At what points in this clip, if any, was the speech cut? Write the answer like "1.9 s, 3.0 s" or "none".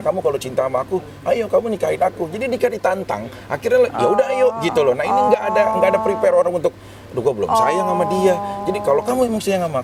none